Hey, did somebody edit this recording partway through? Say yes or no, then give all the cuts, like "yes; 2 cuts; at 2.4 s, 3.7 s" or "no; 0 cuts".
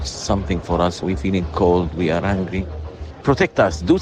yes; 2 cuts; at 1.0 s, 3.1 s